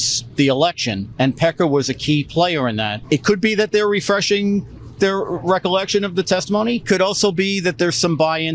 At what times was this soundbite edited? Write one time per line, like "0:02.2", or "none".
0:03.0
0:06.8